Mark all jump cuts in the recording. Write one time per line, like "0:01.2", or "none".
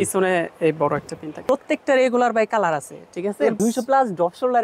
0:01.4
0:03.6